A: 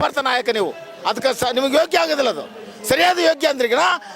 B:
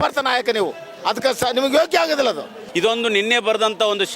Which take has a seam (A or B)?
B